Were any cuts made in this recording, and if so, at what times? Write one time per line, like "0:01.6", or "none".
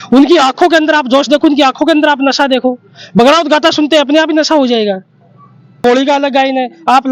0:05.8